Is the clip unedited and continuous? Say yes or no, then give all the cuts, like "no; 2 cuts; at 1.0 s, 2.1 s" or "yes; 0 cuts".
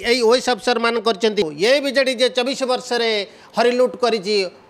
no; 1 cut; at 1.4 s